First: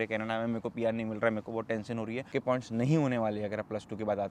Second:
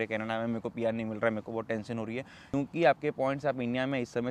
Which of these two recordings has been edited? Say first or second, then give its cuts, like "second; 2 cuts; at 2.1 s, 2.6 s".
first; 1 cut; at 2.3 s